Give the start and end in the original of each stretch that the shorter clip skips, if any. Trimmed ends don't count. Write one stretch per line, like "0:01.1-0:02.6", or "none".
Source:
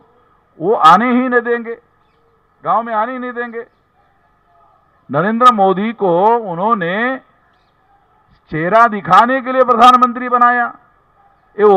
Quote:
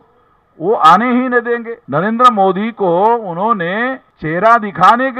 0:01.8-0:05.0
0:07.3-0:08.4

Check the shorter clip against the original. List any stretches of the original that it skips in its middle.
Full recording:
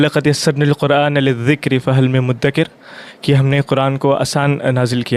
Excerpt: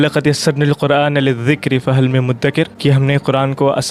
0:02.7-0:03.2

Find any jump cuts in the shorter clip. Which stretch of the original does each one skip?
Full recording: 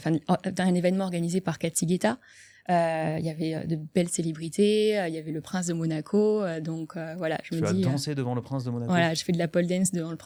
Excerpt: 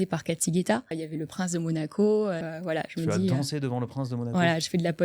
0:02.4-0:05.2
0:06.6-0:07.0

